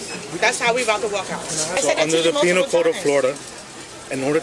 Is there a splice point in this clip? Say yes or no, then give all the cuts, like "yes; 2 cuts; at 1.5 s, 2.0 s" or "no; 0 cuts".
yes; 1 cut; at 1.7 s